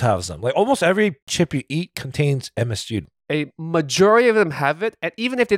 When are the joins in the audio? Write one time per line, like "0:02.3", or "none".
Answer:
0:01.3
0:03.0